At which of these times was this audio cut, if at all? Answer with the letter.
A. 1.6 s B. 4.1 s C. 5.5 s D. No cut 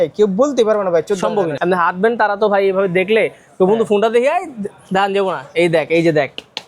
A